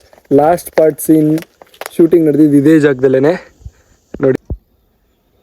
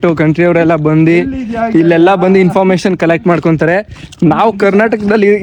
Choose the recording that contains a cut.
first; 1 cut; at 4.4 s

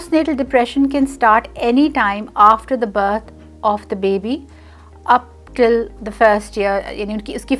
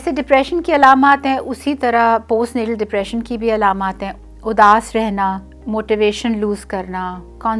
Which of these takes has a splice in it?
second; 2 cuts; at 4.1 s, 5.5 s

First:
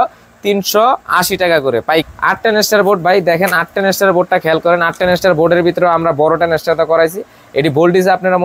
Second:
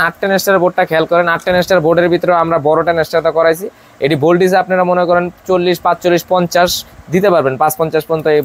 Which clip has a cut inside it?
first; 1 cut; at 2.1 s

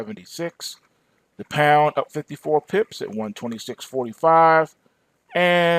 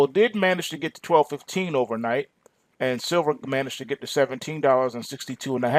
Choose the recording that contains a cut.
first; 1 cut; at 2.2 s

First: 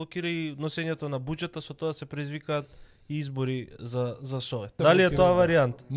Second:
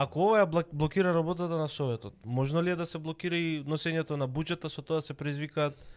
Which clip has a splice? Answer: first; 1 cut; at 4.8 s

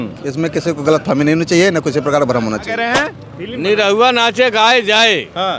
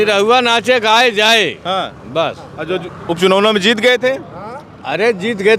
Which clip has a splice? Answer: first; 1 cut; at 2.8 s

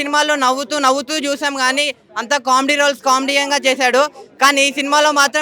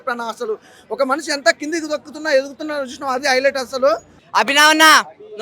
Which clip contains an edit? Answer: second; 1 cut; at 4.2 s

